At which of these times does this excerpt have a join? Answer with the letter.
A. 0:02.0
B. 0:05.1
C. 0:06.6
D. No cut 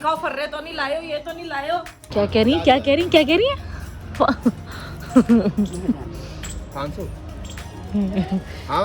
A